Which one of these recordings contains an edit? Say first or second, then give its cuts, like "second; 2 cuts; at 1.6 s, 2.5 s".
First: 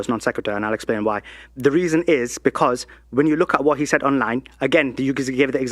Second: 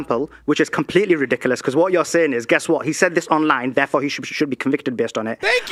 first; 1 cut; at 1.8 s